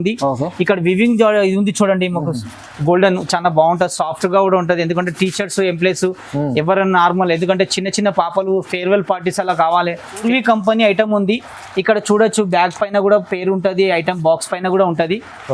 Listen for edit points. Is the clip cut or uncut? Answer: cut